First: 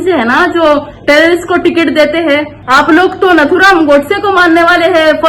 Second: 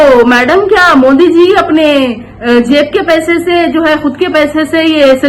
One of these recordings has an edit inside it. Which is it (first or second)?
first